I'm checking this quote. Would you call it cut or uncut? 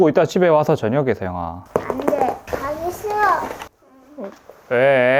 cut